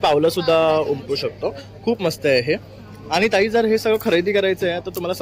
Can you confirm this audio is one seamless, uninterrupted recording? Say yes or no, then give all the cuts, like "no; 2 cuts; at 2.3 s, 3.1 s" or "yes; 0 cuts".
yes; 0 cuts